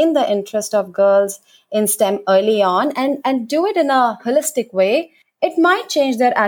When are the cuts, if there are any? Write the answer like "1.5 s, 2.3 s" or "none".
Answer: 5.2 s